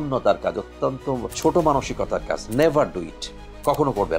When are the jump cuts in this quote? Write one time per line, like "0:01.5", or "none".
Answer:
none